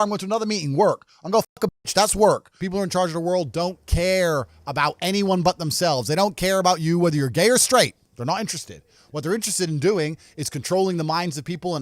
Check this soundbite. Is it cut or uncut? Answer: cut